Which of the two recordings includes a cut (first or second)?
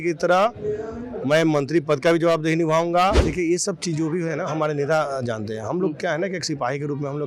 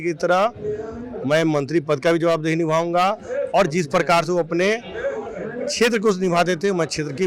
first